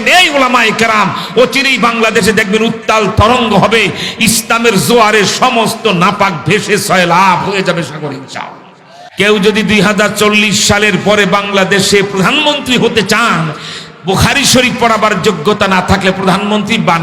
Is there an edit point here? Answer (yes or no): yes